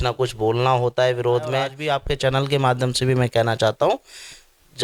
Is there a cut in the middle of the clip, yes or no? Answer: yes